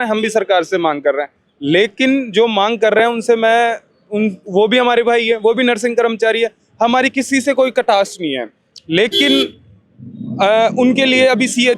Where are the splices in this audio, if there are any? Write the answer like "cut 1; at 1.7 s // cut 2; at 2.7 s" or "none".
none